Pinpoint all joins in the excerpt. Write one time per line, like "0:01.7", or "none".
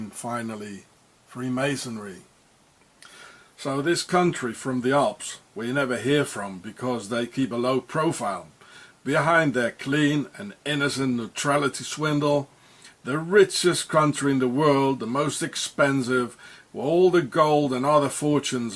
0:04.5